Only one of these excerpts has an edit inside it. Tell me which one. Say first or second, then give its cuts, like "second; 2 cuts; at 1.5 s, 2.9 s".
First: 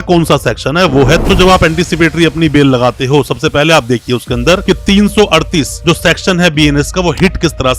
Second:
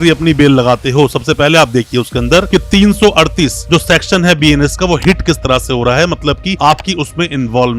first; 1 cut; at 1.2 s